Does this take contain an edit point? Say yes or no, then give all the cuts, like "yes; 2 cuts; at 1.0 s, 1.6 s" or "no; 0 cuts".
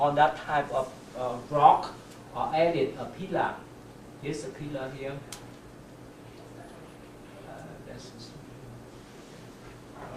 no; 0 cuts